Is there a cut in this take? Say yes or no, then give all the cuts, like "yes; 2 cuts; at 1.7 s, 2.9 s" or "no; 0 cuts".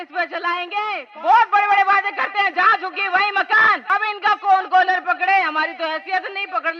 yes; 2 cuts; at 1.1 s, 3.8 s